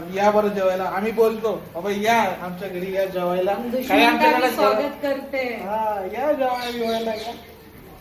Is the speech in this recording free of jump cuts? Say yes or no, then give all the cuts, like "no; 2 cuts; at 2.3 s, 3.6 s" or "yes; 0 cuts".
yes; 0 cuts